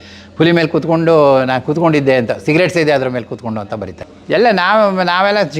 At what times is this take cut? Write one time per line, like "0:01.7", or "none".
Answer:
0:04.0